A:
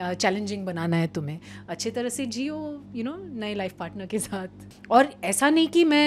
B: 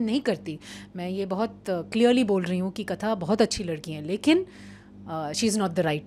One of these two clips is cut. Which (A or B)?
A